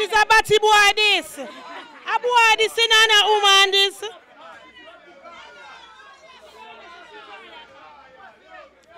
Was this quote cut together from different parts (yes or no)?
no